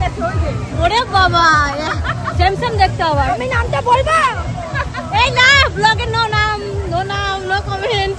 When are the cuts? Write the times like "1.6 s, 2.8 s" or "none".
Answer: none

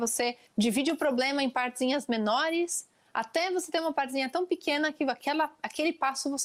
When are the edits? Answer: none

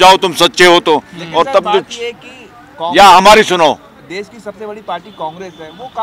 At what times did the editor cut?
none

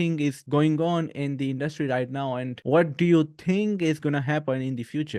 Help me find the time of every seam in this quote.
none

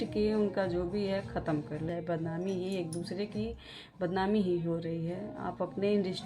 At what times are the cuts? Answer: 1.9 s

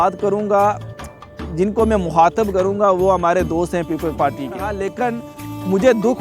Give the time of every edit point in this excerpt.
4.8 s

